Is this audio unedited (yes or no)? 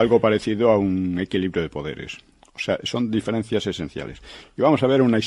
no